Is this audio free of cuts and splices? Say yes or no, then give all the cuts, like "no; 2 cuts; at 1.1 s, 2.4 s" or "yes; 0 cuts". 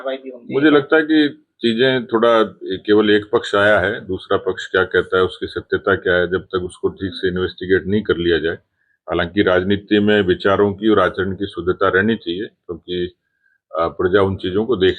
yes; 0 cuts